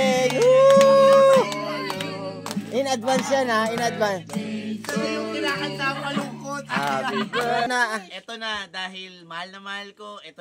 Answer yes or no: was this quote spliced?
yes